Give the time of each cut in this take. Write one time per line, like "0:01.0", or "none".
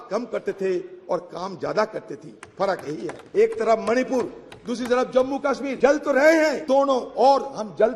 0:03.2
0:05.7
0:06.6

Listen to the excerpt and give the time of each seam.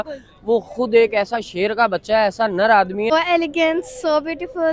0:03.1

